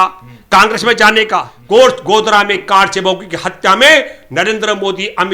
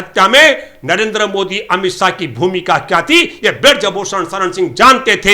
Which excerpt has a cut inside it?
first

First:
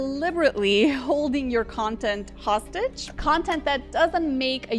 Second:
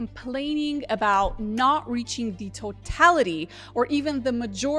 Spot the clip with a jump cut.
first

